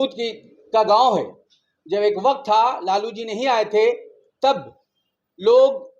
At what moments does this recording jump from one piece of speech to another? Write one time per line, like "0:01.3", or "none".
none